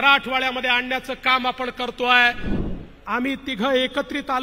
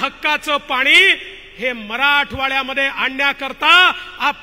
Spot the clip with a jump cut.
first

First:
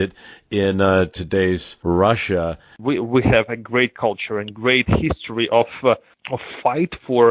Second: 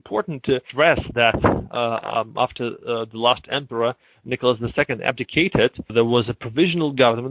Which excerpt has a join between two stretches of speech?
first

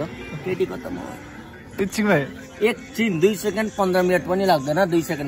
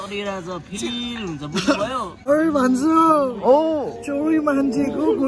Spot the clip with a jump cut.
second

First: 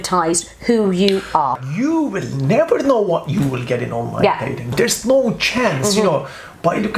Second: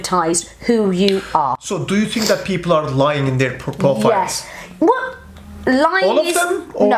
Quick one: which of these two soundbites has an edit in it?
first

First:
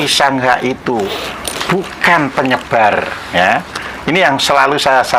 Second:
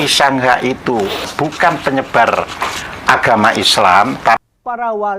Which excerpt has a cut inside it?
second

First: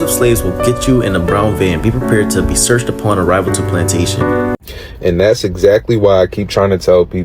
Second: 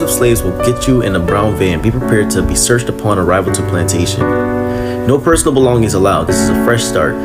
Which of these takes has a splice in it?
first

